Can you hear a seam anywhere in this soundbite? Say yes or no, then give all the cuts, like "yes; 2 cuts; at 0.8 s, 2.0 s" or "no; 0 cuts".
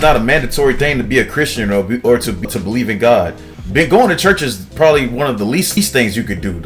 yes; 2 cuts; at 2.4 s, 5.8 s